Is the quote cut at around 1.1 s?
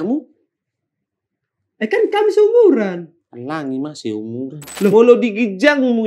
no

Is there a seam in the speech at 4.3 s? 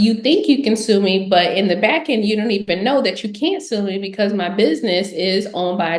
no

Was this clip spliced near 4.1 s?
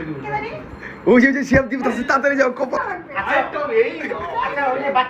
no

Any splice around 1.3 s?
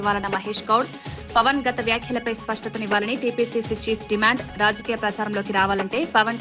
no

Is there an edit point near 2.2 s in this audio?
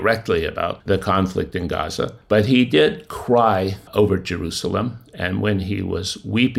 yes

